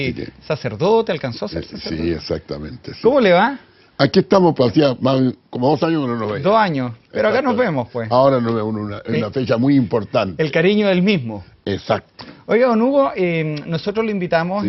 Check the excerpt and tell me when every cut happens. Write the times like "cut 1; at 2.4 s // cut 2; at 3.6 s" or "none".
cut 1; at 3.6 s